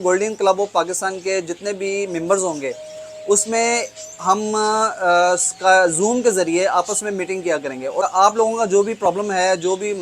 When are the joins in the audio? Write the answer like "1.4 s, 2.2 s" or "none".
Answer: 8.1 s